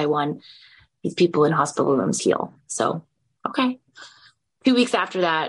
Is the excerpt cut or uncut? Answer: cut